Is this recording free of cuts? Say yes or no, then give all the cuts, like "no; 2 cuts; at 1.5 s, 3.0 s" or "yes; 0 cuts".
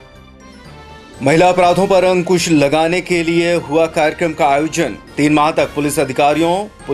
no; 1 cut; at 1.0 s